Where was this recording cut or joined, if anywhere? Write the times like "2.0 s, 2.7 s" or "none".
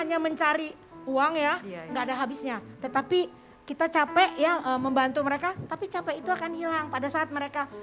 none